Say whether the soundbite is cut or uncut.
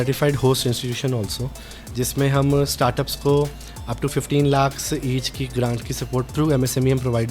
cut